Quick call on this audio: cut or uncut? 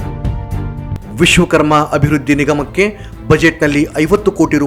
cut